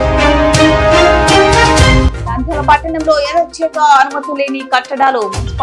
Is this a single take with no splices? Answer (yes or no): no